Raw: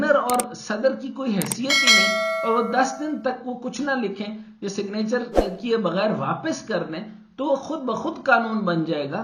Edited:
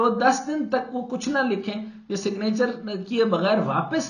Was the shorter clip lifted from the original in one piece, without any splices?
yes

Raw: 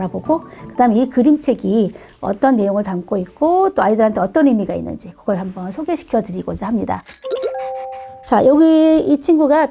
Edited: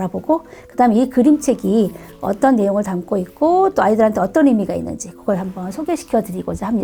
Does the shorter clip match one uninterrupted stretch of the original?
yes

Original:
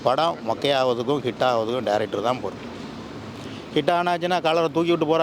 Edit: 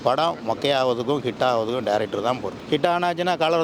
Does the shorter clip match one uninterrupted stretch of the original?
no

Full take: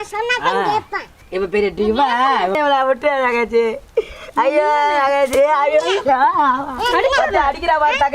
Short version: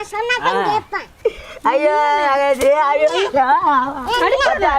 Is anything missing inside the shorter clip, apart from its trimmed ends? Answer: yes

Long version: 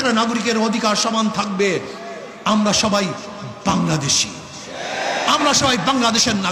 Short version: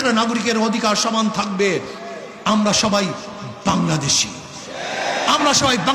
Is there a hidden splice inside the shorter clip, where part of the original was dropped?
no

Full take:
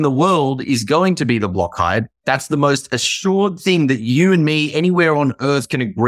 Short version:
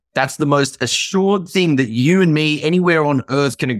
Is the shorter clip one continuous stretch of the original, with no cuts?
yes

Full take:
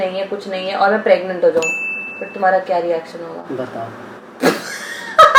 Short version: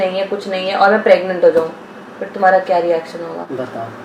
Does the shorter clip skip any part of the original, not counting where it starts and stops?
no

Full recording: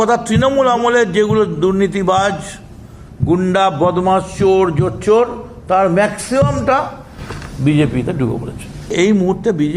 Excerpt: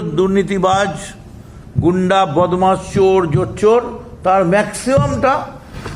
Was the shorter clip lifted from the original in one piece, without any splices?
yes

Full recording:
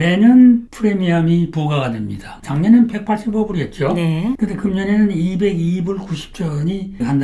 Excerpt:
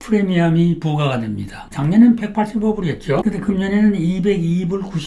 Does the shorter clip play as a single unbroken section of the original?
no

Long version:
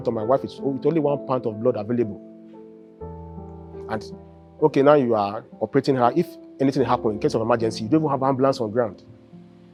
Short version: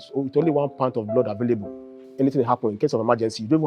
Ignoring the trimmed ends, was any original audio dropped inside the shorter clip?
yes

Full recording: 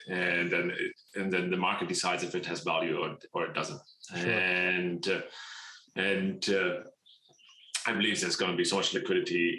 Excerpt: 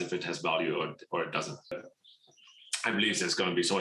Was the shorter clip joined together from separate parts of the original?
yes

